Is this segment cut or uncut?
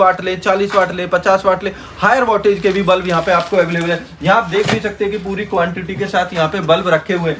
uncut